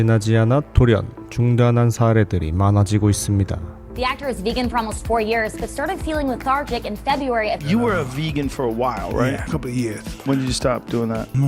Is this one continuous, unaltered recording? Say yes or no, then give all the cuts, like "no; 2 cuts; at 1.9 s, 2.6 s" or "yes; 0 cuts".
yes; 0 cuts